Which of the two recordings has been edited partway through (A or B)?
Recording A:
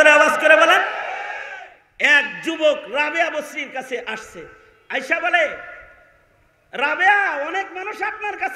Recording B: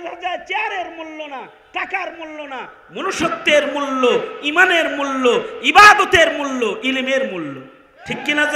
A